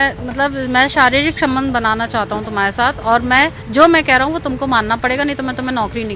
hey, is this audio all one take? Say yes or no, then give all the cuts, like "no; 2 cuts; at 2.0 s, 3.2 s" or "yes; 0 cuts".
no; 1 cut; at 3.6 s